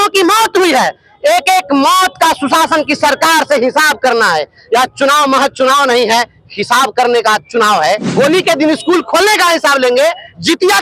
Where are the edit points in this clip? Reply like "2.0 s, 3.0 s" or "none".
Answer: 8.1 s